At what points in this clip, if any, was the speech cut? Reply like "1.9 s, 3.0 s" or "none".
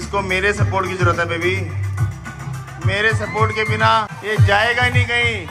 4.1 s